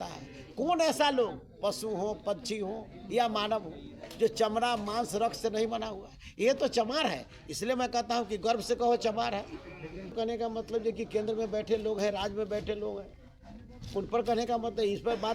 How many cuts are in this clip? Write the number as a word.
one